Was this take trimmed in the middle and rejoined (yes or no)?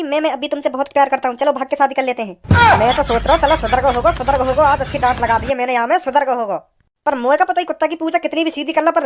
no